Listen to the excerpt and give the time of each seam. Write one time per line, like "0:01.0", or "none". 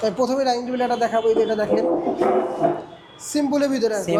none